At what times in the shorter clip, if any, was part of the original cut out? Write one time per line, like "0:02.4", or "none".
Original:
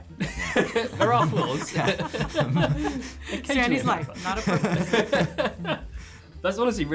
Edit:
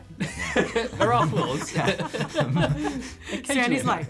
none